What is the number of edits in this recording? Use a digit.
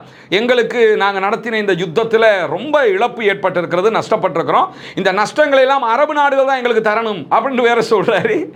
0